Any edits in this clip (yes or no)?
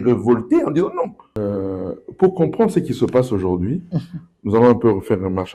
yes